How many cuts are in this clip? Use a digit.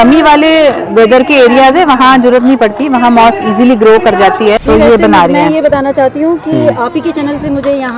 1